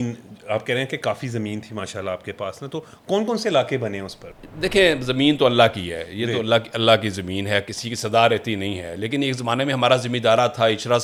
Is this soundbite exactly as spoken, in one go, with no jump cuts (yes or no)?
yes